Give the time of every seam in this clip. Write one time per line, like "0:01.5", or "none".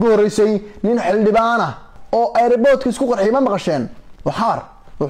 none